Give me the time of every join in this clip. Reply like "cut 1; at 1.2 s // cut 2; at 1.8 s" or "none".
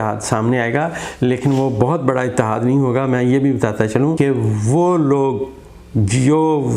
cut 1; at 4.2 s